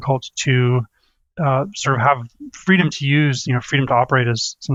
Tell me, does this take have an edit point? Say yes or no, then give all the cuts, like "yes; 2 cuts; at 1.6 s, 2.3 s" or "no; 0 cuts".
no; 0 cuts